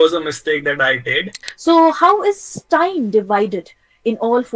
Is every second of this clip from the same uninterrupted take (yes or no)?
no